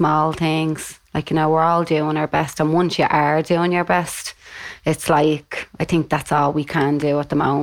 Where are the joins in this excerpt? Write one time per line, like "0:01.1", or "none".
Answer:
none